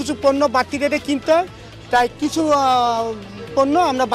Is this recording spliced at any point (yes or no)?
no